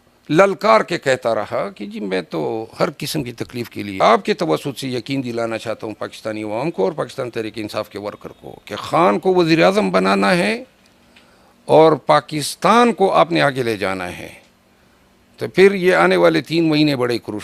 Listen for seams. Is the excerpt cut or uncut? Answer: cut